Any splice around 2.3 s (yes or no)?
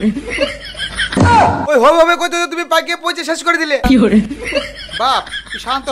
no